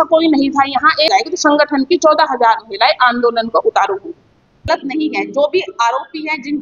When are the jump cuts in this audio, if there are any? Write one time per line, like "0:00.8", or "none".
0:01.1
0:04.7